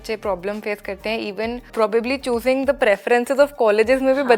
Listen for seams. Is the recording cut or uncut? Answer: cut